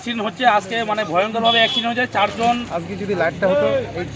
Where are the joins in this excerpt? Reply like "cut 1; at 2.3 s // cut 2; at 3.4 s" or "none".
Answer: cut 1; at 2.7 s